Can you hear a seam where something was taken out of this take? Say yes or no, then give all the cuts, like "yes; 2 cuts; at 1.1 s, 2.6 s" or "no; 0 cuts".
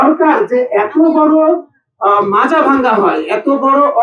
no; 0 cuts